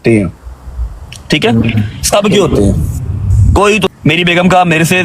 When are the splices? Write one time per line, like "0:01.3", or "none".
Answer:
0:03.9